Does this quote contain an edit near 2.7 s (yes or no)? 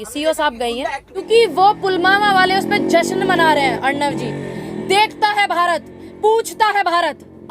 no